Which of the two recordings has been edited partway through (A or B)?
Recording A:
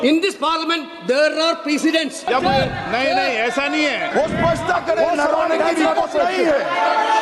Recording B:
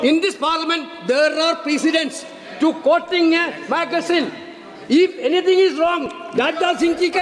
A